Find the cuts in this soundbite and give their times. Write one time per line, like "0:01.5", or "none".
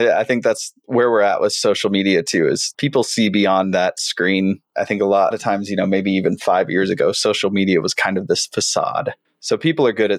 none

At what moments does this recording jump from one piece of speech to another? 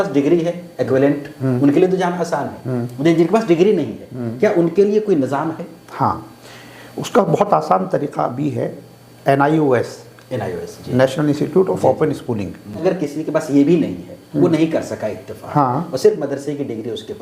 0:12.8

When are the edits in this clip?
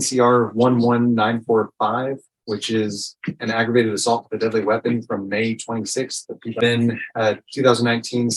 0:06.6

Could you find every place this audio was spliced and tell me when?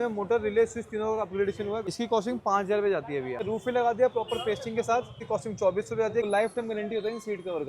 0:01.9
0:03.4
0:05.2
0:06.3

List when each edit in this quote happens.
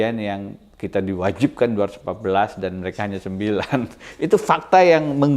none

